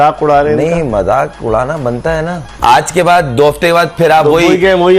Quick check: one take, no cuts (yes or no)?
yes